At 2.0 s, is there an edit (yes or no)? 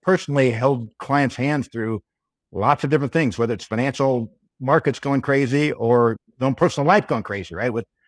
no